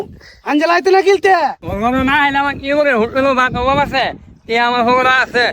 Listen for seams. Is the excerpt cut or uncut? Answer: cut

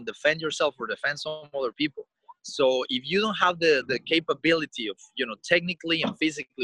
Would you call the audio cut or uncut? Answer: uncut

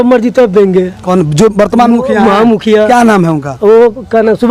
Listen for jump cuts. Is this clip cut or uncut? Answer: uncut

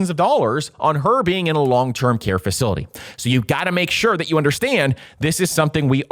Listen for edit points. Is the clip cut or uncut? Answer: uncut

